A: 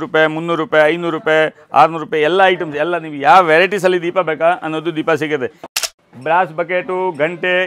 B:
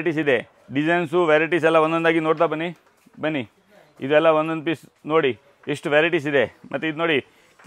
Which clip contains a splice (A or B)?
A